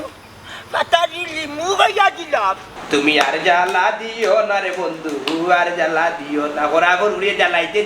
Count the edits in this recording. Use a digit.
1